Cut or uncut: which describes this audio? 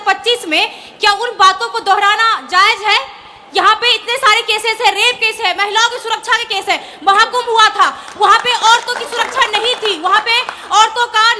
uncut